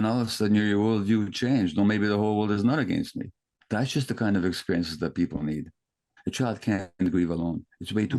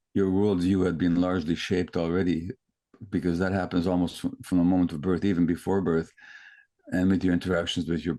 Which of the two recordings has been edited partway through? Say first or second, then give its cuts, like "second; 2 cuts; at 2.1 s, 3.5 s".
first; 2 cuts; at 3.5 s, 6.1 s